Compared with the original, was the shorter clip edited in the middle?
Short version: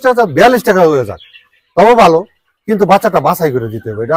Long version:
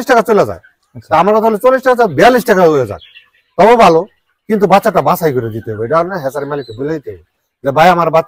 no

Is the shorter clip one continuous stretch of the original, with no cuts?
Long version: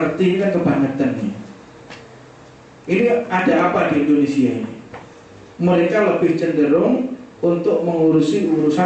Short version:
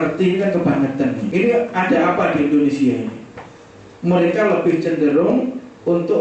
no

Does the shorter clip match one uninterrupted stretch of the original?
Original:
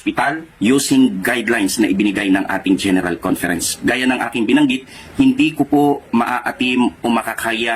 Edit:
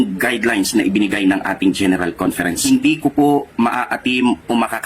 no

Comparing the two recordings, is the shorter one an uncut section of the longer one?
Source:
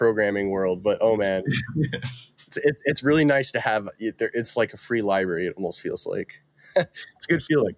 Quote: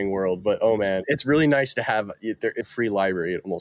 no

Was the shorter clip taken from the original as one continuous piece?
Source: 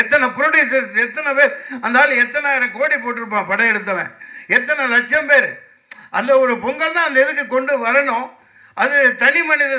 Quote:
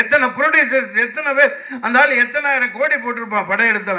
yes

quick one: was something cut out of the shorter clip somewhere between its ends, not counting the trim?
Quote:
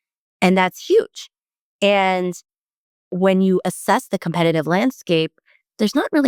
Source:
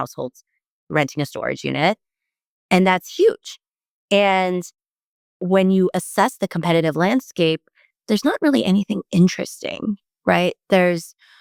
no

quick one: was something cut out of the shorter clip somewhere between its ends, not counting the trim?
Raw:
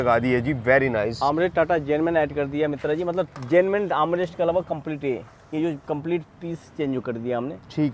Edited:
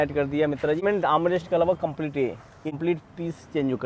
yes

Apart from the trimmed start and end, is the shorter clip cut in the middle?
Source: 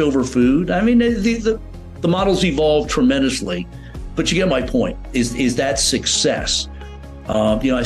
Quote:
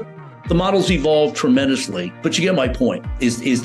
yes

